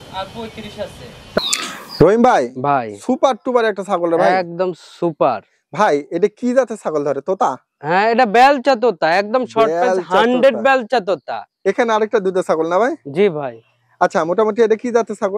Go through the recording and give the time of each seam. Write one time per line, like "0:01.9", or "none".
0:01.4
0:11.4